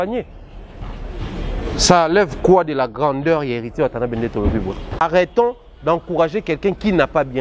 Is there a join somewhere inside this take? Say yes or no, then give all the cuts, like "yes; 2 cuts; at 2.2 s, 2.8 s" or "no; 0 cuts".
yes; 1 cut; at 5.0 s